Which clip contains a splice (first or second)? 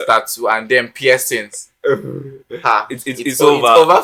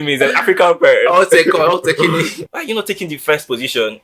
second